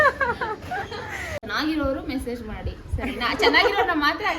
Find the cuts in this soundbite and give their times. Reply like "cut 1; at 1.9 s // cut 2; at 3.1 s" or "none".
cut 1; at 1.4 s

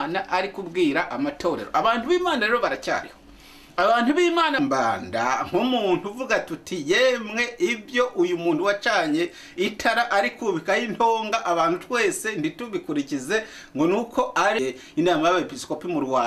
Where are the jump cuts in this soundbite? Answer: cut 1; at 4.6 s // cut 2; at 14.6 s

